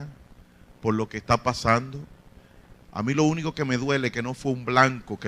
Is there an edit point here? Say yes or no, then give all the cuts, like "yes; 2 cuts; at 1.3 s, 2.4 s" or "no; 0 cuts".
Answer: no; 0 cuts